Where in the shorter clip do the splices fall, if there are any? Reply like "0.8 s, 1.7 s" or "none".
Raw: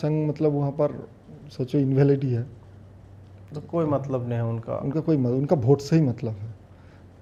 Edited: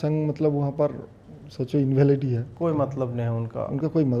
2.5 s